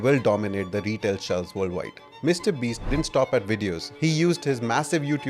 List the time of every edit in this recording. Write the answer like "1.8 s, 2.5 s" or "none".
2.0 s, 3.9 s